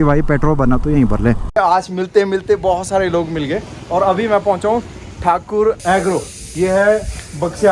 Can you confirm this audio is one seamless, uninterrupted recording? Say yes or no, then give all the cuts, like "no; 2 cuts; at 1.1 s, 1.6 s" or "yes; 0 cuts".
no; 1 cut; at 1.5 s